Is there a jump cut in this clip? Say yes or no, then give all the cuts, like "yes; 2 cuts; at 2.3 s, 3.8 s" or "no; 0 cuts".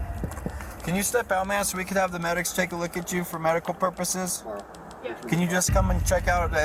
no; 0 cuts